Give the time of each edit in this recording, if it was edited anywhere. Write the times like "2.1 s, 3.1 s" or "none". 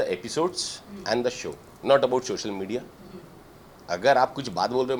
none